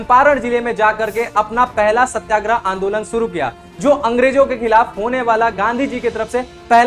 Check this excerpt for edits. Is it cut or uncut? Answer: uncut